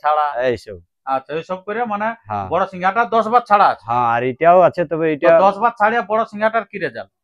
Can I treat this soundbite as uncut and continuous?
yes; 0 cuts

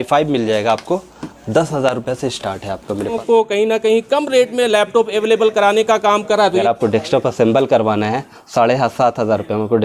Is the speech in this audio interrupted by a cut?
yes; 2 cuts; at 3.2 s, 6.6 s

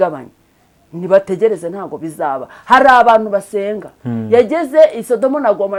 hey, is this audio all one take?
yes; 0 cuts

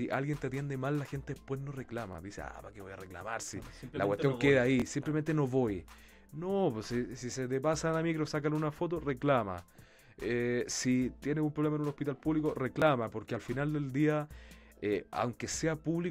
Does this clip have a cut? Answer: no; 0 cuts

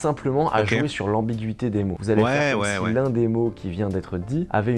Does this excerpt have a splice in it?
no; 0 cuts

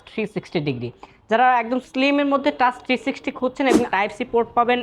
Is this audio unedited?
no; 1 cut; at 3.9 s

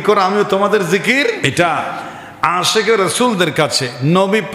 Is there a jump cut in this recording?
yes; 1 cut; at 1.4 s

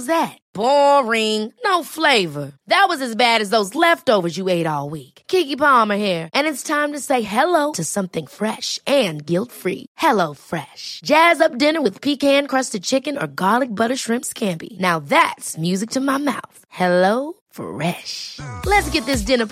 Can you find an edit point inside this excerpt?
no; 0 cuts

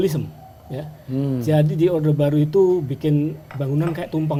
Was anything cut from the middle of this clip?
no; 0 cuts

